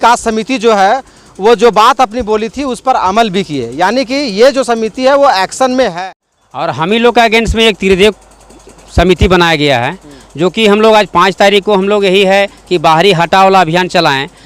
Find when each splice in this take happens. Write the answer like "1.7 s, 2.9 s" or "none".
5.9 s